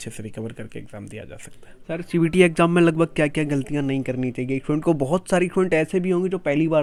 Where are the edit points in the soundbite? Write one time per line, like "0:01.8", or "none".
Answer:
none